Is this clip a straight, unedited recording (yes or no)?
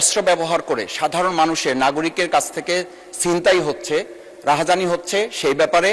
yes